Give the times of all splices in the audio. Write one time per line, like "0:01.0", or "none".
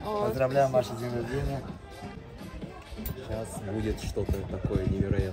none